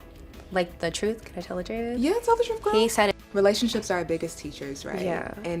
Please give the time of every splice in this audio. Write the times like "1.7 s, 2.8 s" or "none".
3.2 s